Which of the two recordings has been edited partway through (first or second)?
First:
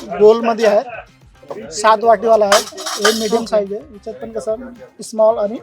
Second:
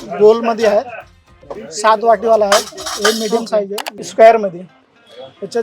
second